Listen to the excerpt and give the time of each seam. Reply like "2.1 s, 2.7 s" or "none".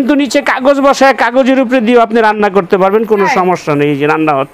none